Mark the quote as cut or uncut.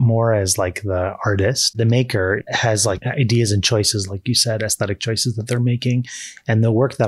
cut